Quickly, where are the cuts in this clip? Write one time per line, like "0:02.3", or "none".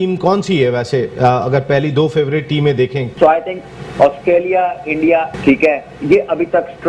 0:03.1
0:05.3